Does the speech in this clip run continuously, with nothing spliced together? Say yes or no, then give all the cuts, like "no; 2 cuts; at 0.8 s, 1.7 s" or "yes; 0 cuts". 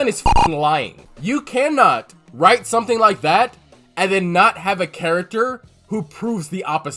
no; 1 cut; at 1.0 s